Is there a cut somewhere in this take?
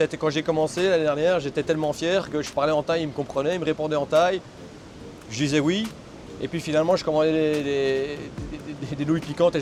no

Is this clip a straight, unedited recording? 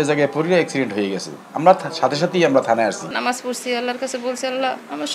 no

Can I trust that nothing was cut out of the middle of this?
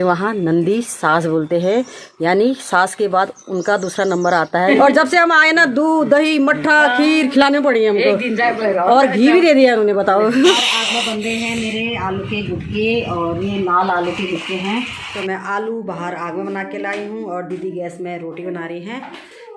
no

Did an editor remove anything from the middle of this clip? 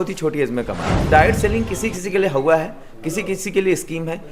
yes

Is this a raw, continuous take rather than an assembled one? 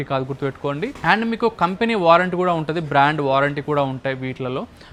yes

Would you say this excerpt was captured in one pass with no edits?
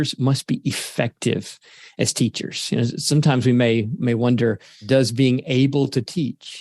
no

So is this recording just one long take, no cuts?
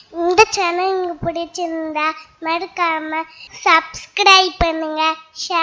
yes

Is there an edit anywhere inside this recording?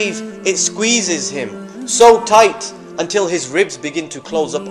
no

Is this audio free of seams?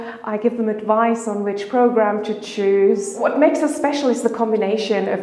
yes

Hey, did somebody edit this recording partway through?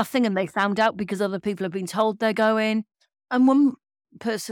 yes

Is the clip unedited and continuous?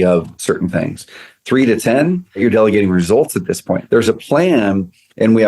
no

